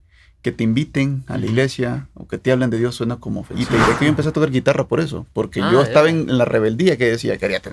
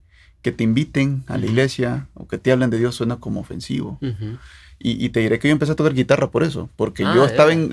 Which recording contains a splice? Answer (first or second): first